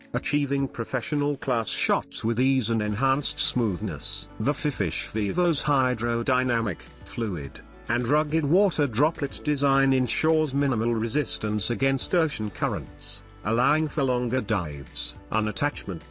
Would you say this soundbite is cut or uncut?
cut